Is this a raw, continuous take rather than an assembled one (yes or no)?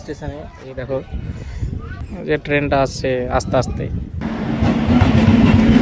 no